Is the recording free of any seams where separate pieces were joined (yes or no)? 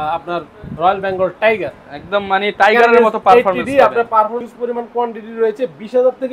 no